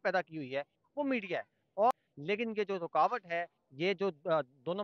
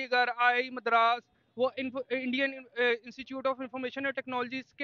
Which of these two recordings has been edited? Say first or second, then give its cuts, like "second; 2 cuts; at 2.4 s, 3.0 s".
first; 1 cut; at 1.9 s